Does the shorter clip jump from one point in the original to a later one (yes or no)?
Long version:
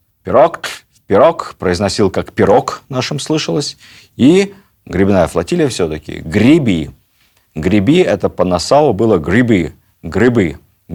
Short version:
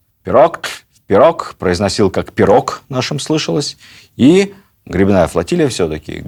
no